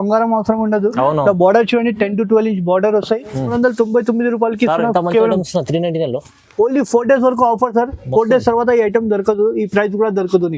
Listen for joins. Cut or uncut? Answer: cut